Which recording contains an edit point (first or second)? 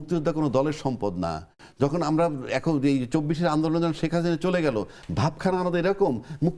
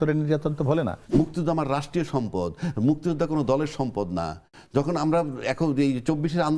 second